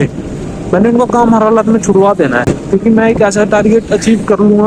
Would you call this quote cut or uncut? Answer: uncut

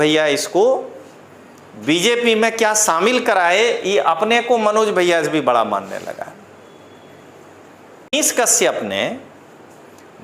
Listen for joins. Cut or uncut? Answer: cut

